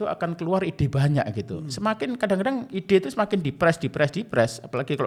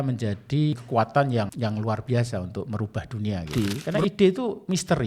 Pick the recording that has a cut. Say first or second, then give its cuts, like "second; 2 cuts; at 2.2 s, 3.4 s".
second; 3 cuts; at 0.8 s, 1.5 s, 3.5 s